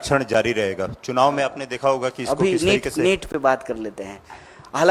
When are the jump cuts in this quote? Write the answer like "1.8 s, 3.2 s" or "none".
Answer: none